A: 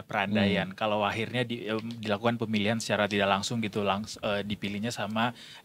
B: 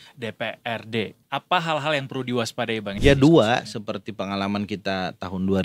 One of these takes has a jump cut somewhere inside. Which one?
B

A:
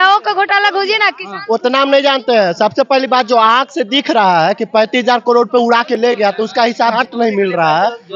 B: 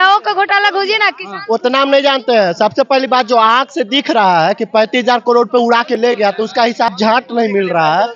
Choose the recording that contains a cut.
A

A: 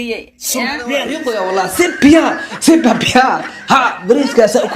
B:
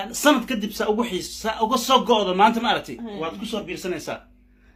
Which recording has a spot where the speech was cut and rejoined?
A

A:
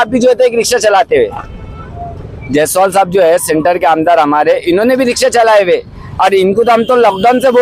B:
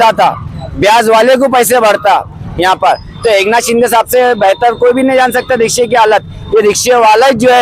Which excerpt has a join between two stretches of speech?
B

